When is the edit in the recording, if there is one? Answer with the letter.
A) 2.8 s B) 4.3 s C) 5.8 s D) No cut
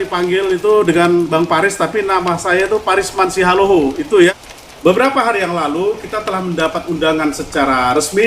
B